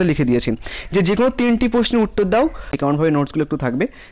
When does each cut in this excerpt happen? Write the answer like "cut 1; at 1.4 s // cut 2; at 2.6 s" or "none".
cut 1; at 2.7 s